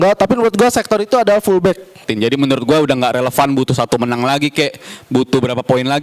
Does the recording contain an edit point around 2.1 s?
yes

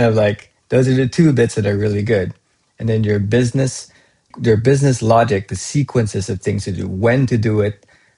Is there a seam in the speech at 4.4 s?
yes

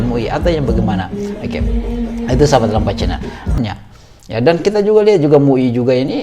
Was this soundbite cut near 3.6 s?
yes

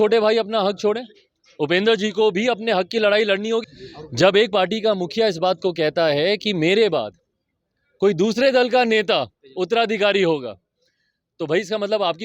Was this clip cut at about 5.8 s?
no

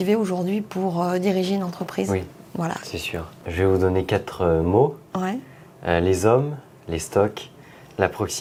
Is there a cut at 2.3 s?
no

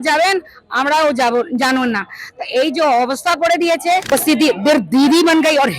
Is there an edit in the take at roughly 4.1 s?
yes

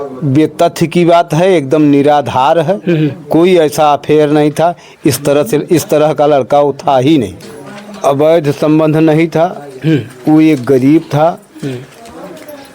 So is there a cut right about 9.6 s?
no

